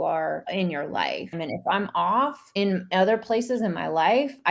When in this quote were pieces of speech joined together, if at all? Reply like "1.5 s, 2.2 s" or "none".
0.9 s, 2.4 s